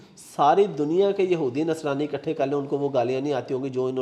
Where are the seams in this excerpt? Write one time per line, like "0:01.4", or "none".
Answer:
none